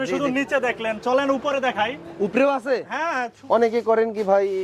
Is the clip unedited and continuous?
no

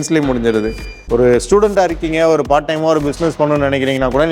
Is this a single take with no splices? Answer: no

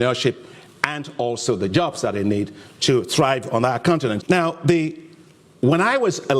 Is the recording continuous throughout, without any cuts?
no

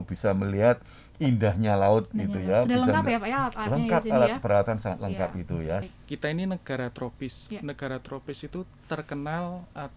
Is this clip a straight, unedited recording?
no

